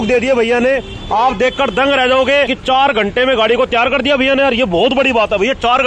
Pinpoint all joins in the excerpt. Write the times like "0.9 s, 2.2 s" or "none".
2.6 s

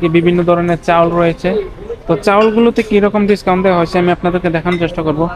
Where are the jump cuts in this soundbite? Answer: none

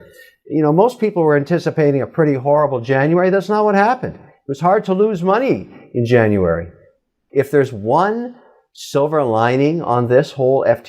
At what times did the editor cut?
7.2 s

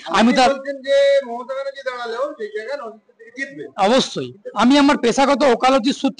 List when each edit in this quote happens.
4.4 s

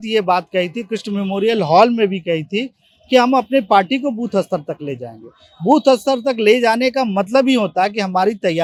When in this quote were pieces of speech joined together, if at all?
none

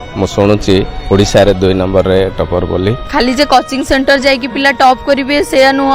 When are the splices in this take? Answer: 3.1 s

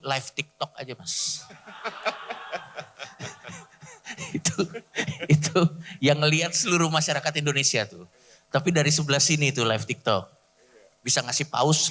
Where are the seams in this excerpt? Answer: none

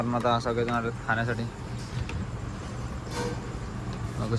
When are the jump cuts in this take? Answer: none

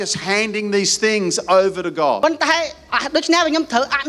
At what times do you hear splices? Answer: 2.2 s

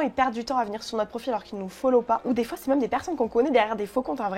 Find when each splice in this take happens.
2.2 s

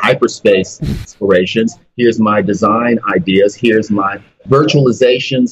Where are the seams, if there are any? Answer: 1.0 s, 4.3 s

